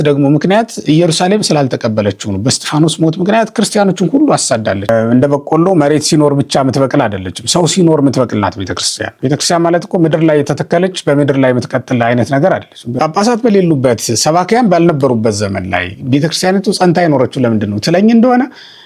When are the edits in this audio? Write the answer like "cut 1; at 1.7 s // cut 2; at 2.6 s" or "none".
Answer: cut 1; at 4.8 s // cut 2; at 9.0 s // cut 3; at 12.9 s

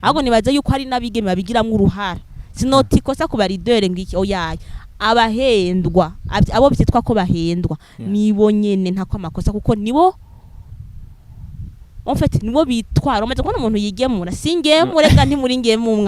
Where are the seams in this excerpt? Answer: none

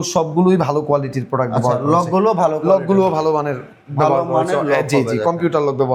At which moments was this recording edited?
none

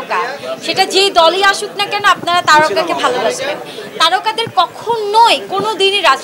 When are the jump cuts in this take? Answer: none

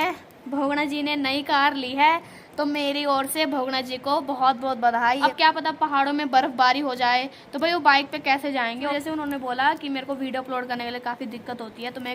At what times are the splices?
cut 1; at 5.2 s // cut 2; at 8.9 s

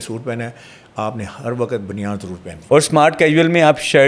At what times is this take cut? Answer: cut 1; at 2.6 s

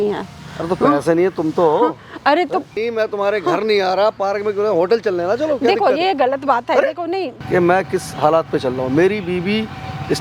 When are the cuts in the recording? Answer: cut 1; at 2.7 s // cut 2; at 7.4 s

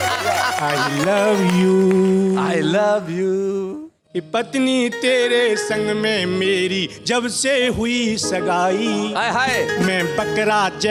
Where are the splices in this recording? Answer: none

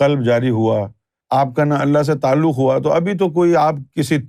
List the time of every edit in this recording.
none

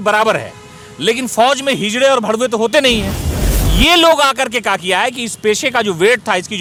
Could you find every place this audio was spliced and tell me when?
none

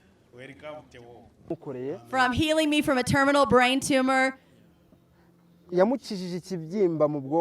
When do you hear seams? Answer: cut 1; at 1.6 s

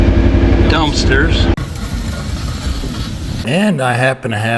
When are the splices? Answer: cut 1; at 3.4 s

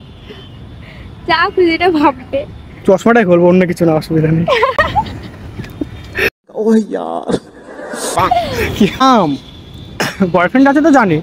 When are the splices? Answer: cut 1; at 9.0 s

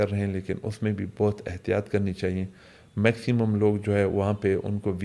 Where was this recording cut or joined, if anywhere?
none

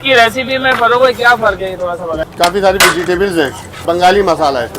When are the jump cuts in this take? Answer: cut 1; at 2.1 s // cut 2; at 3.7 s

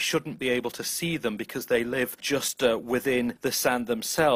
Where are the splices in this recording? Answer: cut 1; at 2.2 s // cut 2; at 3.4 s

